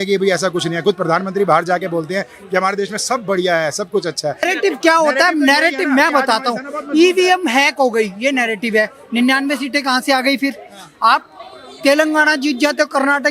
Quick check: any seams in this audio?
yes; 1 cut; at 4.4 s

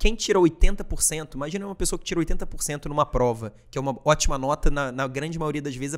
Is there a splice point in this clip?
no; 0 cuts

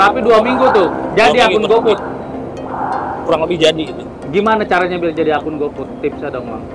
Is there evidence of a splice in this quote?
no; 0 cuts

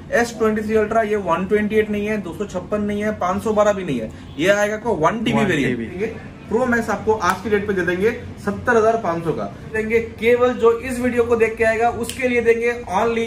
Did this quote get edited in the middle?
yes; 2 cuts; at 5.9 s, 9.7 s

